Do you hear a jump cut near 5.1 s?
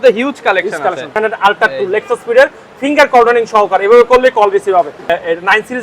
yes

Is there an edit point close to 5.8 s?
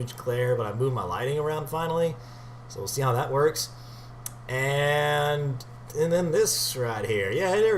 yes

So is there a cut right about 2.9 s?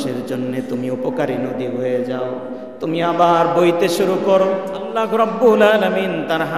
no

